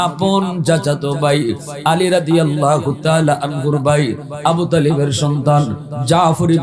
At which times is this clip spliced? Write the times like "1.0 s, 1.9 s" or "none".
none